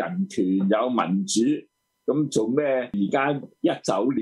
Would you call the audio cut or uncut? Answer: cut